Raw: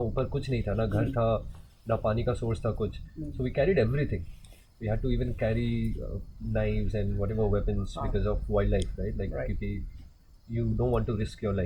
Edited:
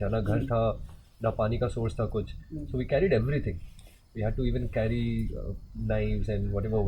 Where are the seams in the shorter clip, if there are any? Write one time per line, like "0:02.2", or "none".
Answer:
none